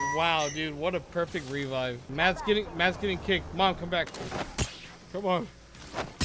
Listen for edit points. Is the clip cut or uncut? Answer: cut